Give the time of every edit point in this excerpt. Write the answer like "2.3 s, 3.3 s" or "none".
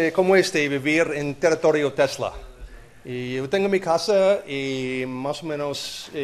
2.3 s